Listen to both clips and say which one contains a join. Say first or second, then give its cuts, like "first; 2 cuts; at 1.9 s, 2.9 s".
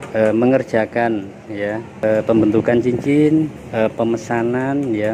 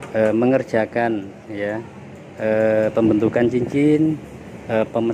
first; 2 cuts; at 2.0 s, 3.6 s